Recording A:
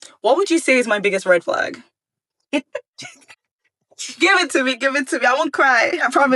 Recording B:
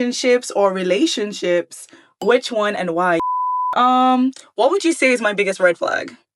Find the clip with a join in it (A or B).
B